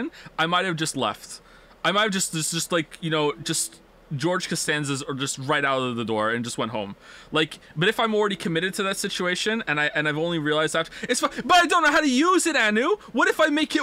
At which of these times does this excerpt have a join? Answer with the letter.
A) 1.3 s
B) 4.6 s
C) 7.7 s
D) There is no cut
B